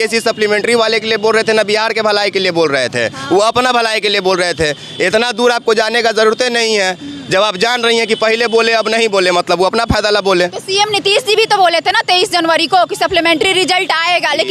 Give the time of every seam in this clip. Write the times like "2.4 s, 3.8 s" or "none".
none